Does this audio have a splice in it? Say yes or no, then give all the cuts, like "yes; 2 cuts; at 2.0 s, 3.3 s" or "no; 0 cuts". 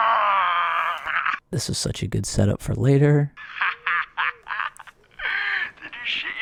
no; 0 cuts